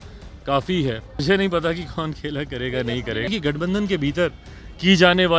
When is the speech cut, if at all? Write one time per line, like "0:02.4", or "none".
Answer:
0:01.2
0:03.3